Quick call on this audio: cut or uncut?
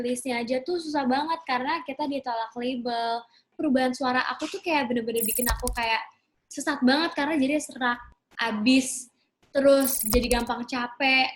cut